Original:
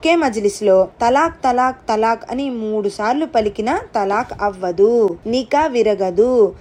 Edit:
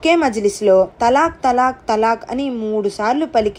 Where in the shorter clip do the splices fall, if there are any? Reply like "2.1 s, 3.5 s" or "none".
none

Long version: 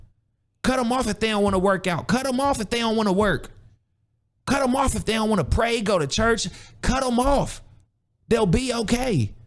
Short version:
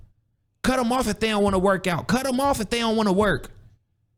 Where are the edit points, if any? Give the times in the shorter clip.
none

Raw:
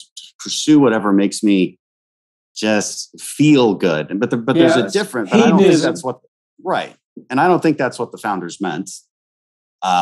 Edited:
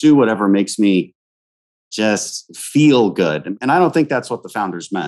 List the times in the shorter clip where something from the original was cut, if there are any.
3.4 s

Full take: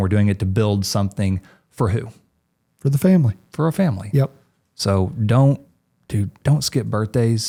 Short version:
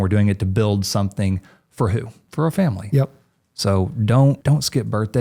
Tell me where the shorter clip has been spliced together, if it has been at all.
2.2 s, 4.4 s

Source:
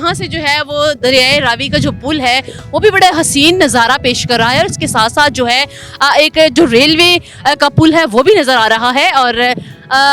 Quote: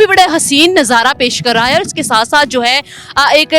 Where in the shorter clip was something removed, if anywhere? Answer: none

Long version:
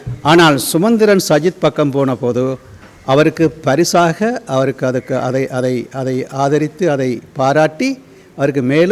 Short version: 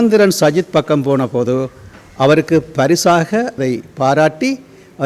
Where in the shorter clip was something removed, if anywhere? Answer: 3.6 s

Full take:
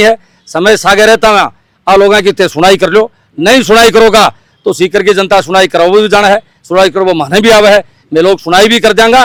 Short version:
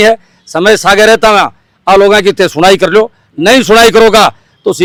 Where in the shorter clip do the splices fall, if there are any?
none

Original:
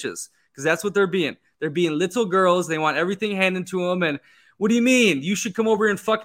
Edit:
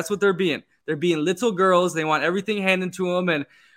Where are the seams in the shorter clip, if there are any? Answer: none

